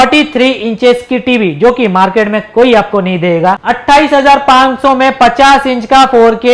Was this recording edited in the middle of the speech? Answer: yes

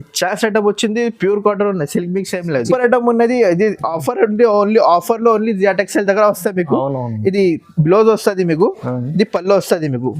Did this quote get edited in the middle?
yes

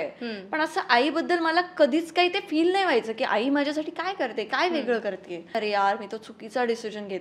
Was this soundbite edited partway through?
yes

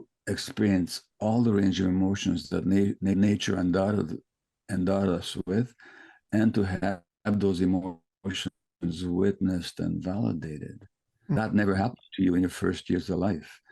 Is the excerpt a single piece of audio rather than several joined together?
no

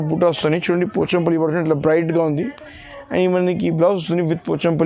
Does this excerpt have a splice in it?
no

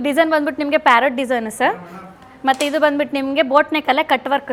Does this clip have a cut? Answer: no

